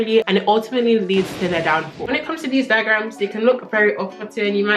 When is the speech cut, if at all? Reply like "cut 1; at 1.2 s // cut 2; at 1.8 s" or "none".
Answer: cut 1; at 2.1 s